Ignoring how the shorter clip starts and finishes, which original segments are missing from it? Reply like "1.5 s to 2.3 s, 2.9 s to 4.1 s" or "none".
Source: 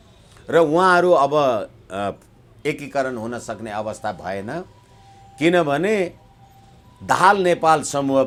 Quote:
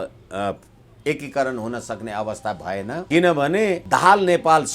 4.6 s to 5.3 s, 6.1 s to 7.0 s